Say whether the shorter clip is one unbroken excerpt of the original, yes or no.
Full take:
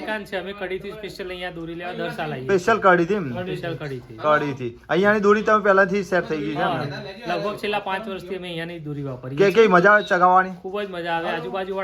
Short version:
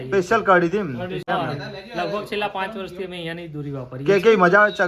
no